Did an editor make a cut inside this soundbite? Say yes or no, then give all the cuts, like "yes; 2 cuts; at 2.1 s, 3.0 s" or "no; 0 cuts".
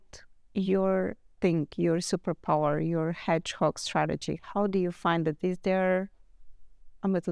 no; 0 cuts